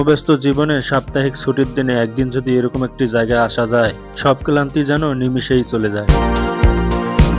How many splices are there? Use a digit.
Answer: 0